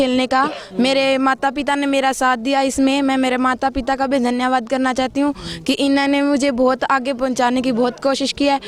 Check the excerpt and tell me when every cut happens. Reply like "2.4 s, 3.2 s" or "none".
none